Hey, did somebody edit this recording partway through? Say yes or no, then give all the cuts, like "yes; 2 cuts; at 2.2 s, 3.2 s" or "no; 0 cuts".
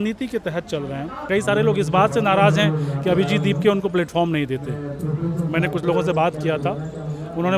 yes; 1 cut; at 1.2 s